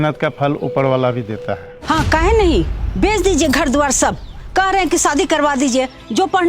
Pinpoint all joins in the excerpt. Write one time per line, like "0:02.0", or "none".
0:01.7